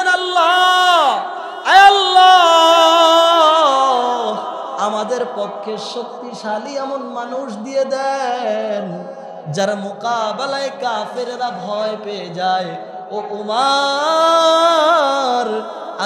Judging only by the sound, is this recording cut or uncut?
uncut